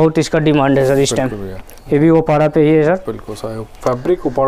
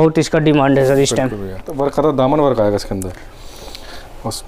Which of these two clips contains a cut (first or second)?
second